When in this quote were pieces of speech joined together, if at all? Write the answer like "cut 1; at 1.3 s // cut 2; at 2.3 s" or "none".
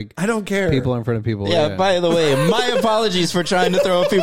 none